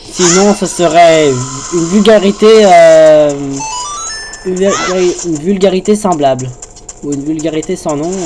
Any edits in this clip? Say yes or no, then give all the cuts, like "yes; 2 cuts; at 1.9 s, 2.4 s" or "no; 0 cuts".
no; 0 cuts